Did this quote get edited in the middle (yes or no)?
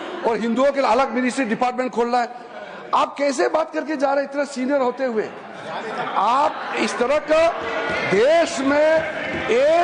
no